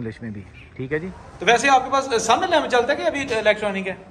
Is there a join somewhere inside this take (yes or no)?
yes